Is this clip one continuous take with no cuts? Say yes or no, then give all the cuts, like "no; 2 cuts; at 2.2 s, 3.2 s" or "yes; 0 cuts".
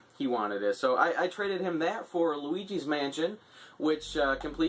yes; 0 cuts